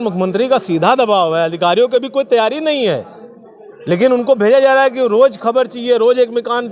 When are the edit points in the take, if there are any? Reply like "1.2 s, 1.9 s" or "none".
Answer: none